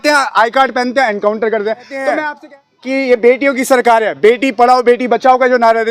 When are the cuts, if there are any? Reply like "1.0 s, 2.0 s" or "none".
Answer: 2.2 s

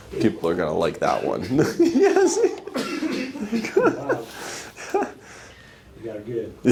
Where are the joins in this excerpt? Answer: none

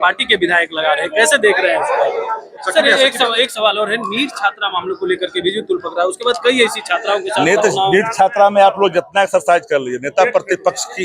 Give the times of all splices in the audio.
2.5 s

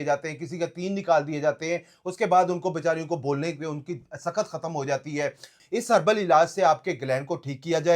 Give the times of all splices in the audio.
5.5 s

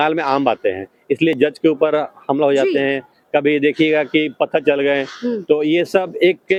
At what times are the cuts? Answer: none

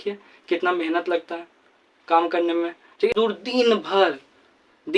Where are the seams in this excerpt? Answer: 3.1 s

